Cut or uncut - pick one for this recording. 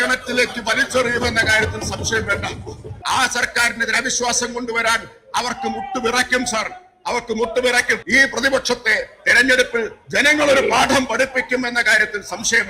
cut